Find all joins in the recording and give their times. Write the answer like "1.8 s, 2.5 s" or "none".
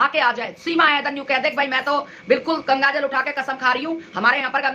none